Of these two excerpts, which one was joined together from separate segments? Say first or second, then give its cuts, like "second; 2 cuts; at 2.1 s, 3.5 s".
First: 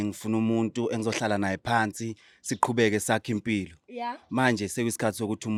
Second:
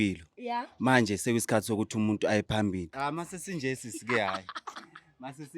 second; 1 cut; at 3.0 s